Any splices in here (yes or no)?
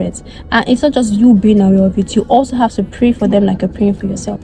no